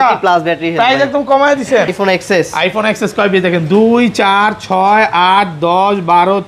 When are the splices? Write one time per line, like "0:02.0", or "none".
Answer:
0:01.9